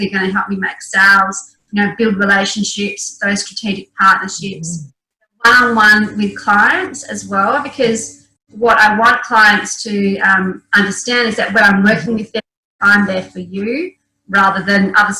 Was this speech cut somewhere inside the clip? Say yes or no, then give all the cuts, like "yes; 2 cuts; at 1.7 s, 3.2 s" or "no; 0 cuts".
no; 0 cuts